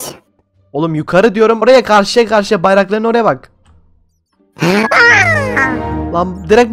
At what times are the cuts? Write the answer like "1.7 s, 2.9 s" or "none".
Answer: 1.6 s